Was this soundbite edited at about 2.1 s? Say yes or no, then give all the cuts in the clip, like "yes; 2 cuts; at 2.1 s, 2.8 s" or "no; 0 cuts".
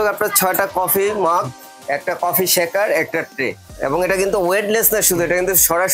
no; 1 cut; at 3.7 s